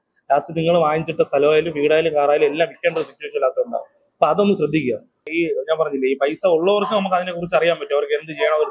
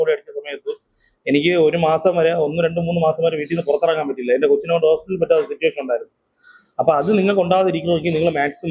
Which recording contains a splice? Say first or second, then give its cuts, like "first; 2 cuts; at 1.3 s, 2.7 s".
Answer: first; 1 cut; at 5.2 s